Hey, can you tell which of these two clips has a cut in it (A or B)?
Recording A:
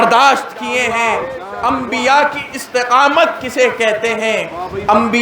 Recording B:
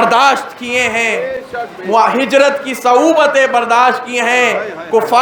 A